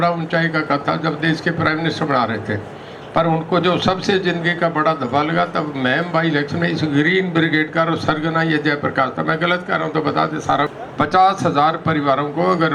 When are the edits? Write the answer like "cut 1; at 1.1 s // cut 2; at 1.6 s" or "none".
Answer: cut 1; at 10.8 s